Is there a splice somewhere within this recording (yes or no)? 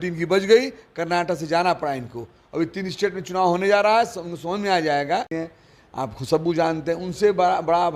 yes